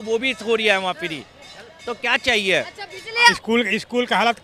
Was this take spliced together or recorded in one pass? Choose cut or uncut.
cut